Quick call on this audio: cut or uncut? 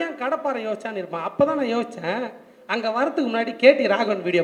uncut